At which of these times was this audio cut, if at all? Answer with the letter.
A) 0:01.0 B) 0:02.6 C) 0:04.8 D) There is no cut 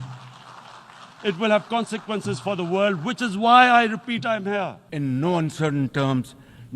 C